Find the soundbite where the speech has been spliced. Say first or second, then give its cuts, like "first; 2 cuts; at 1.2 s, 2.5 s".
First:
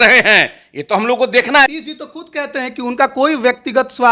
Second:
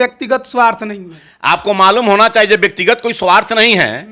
first; 1 cut; at 1.7 s